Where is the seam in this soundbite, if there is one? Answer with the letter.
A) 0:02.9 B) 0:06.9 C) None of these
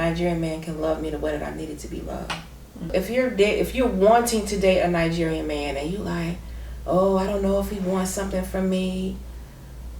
A